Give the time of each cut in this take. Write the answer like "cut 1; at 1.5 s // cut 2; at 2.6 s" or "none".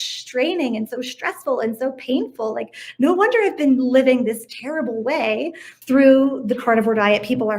cut 1; at 5.7 s